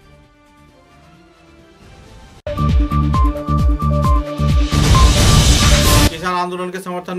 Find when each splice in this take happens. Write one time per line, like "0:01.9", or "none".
0:02.4
0:06.2